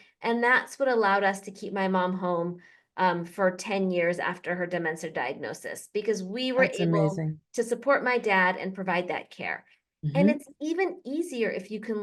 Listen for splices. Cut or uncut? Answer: uncut